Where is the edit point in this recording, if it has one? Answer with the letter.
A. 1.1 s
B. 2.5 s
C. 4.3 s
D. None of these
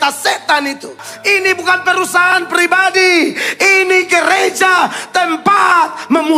A